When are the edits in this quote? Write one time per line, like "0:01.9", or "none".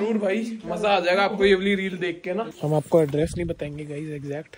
0:02.5